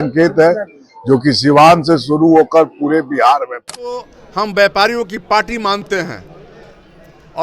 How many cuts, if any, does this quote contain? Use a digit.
1